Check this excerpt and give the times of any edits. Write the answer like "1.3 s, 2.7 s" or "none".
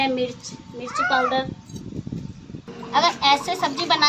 2.7 s